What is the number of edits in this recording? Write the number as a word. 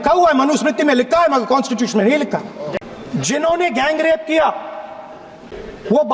one